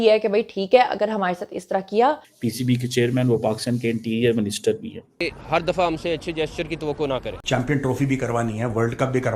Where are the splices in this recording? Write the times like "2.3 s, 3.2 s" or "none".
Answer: 2.3 s, 5.3 s